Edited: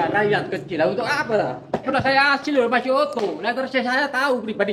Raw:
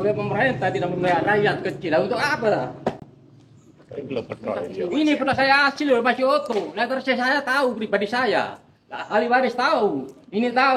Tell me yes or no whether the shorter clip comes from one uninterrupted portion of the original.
no